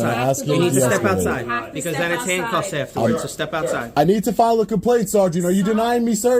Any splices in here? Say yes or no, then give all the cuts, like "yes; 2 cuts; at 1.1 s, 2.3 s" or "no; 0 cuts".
yes; 1 cut; at 3.9 s